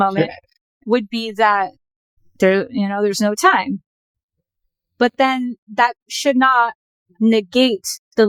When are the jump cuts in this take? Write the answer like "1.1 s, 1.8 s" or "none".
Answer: none